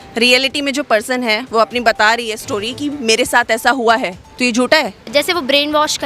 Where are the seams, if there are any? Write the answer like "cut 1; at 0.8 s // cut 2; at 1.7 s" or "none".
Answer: cut 1; at 4.2 s // cut 2; at 5.0 s

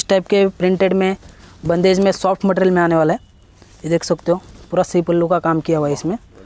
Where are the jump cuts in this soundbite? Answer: none

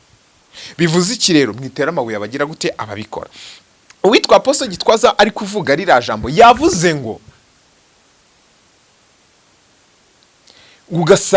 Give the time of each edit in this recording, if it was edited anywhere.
none

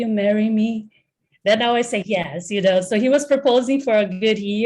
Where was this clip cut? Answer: none

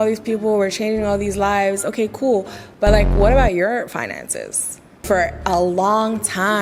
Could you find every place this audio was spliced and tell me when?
cut 1; at 5.0 s

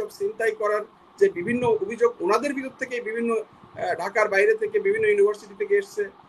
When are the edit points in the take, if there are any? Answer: none

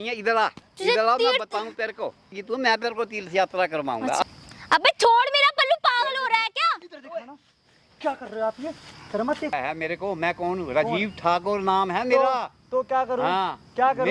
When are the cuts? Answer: cut 1; at 2.4 s // cut 2; at 4.2 s // cut 3; at 9.5 s

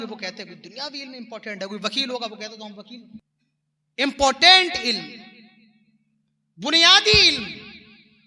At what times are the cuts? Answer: cut 1; at 3.3 s

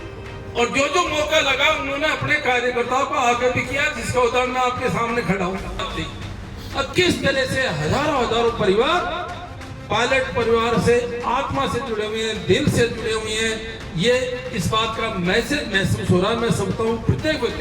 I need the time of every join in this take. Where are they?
cut 1; at 5.8 s

